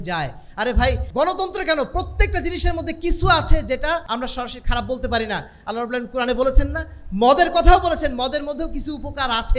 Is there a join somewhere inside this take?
yes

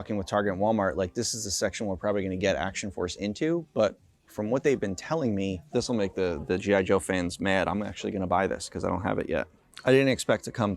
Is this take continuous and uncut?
no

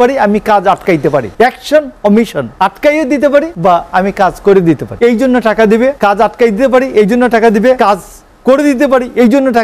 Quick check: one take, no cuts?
no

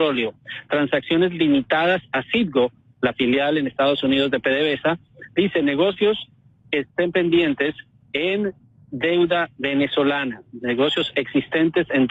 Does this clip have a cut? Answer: no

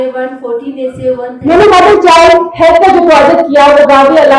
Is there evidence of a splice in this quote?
yes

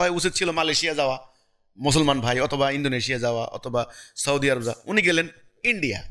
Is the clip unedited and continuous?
yes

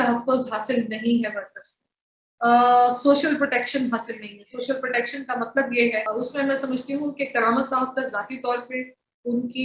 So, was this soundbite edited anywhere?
yes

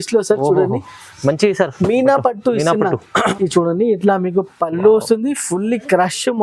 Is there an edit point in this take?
yes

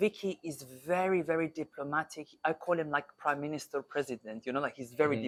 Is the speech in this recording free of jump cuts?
yes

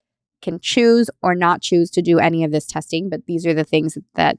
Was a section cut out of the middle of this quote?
no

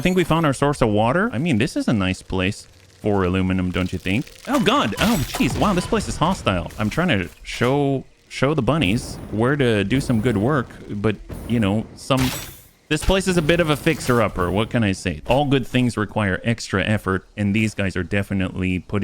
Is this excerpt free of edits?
no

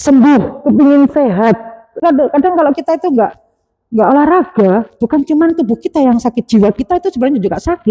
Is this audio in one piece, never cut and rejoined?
no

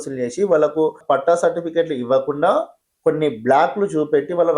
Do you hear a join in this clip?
yes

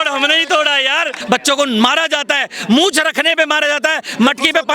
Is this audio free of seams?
no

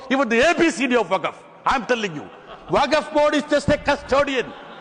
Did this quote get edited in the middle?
no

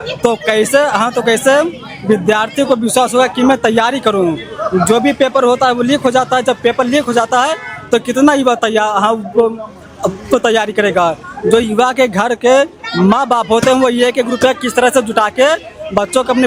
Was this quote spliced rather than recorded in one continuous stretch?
no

